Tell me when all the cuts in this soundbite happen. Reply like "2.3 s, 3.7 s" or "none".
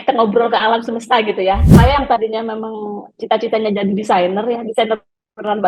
1.7 s